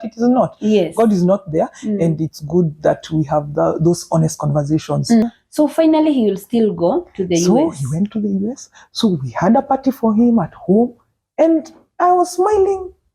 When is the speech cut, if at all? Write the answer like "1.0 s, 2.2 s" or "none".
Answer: 5.2 s